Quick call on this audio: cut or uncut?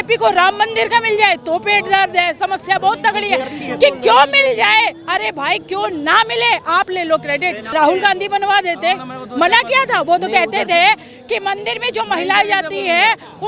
cut